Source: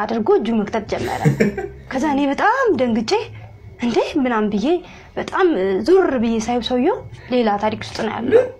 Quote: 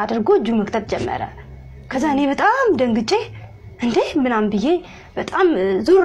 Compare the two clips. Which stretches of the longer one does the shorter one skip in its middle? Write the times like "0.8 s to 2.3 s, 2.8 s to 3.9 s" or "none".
none